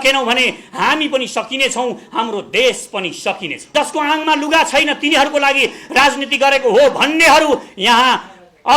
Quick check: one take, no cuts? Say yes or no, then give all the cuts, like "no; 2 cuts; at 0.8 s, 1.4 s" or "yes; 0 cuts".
no; 1 cut; at 3.7 s